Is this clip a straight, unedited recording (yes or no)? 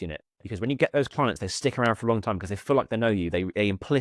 yes